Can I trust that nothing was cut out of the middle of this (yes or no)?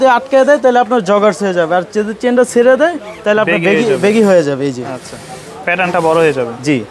yes